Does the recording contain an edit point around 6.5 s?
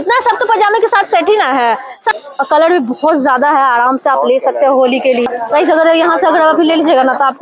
no; 2 cuts; at 2.0 s, 5.3 s

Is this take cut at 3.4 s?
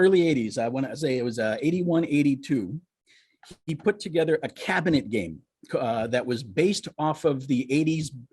no; 0 cuts

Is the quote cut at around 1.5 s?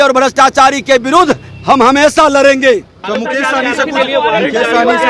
no; 1 cut; at 2.9 s

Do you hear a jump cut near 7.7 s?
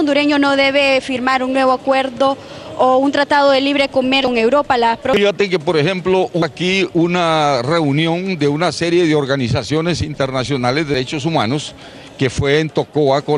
yes; 1 cut; at 7.7 s

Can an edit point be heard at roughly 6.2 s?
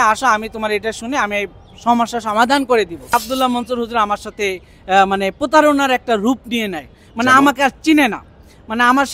no; 1 cut; at 3.1 s

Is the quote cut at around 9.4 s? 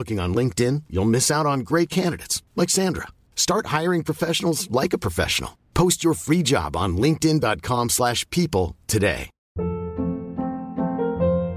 yes; 1 cut; at 9.4 s

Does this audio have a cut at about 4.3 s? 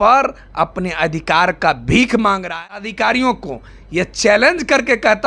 no; 1 cut; at 2.9 s

